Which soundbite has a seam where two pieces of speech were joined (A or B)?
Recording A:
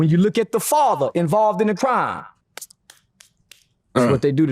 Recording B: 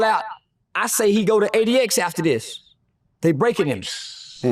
A